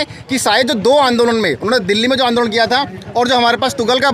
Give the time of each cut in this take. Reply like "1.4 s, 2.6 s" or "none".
none